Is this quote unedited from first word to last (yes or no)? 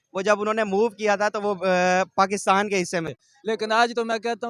no